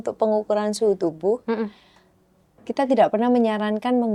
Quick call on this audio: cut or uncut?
uncut